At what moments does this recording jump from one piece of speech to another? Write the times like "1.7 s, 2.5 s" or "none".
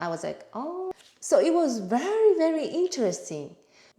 0.9 s